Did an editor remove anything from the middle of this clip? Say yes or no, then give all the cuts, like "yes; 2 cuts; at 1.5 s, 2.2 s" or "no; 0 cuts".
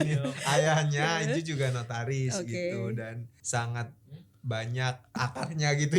yes; 2 cuts; at 3.3 s, 5.2 s